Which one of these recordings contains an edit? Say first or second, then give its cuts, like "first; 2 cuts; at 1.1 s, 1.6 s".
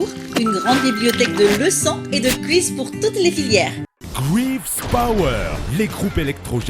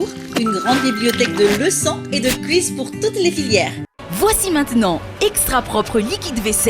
second; 1 cut; at 4.0 s